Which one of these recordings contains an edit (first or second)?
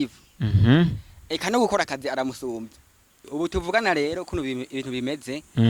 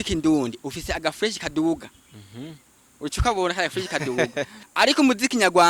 first